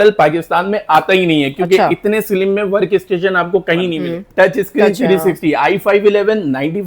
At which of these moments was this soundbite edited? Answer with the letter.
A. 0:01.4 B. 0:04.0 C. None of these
B